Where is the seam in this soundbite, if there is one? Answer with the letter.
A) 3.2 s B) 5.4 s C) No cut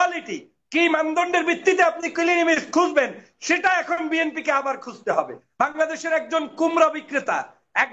B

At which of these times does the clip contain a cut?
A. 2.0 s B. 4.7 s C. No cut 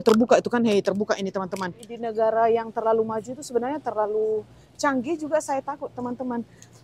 A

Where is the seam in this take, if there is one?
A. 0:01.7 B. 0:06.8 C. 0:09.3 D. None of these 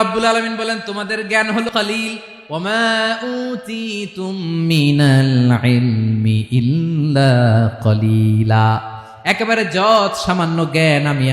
A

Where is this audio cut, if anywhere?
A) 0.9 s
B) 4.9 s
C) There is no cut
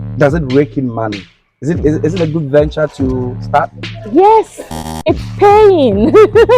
B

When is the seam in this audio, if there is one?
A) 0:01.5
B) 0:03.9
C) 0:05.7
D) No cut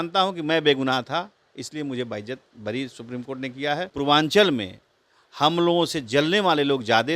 B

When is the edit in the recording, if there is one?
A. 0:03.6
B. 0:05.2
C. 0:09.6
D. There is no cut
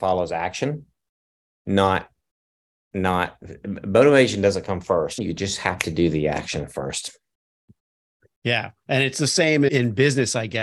B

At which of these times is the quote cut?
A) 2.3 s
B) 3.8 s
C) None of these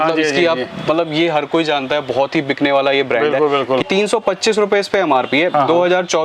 B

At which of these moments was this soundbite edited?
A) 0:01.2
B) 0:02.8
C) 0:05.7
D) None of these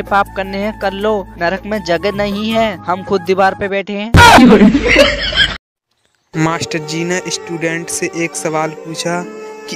C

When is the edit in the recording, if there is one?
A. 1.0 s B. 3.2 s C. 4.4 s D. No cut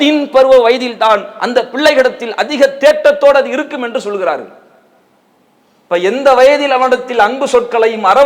D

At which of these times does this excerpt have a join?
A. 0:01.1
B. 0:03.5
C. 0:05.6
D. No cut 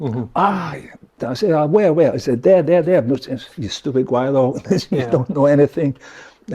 A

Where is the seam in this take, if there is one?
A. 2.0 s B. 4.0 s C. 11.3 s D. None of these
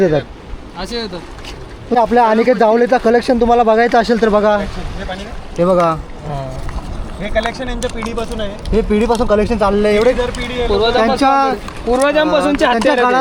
A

